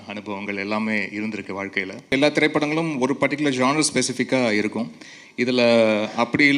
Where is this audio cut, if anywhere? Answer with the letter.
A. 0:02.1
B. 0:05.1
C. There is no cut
A